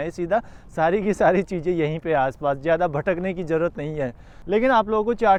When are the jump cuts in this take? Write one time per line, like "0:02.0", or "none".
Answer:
none